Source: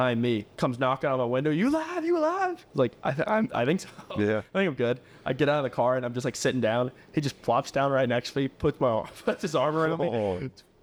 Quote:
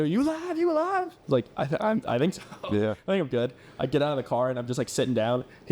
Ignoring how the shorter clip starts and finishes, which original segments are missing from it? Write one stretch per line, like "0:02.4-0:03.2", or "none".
none